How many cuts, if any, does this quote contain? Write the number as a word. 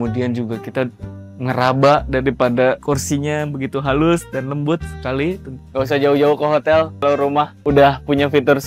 two